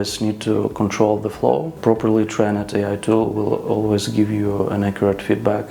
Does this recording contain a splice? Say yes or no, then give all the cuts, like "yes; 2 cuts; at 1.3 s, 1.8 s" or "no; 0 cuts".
yes; 1 cut; at 1.8 s